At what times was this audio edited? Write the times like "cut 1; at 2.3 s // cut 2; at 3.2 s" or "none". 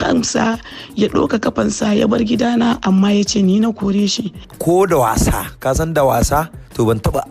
cut 1; at 4.4 s